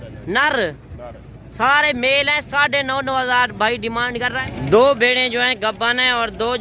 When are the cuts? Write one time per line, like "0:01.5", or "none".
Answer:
0:04.5